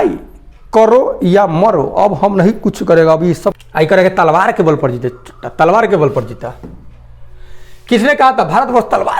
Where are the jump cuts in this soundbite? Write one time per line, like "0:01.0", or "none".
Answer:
0:03.6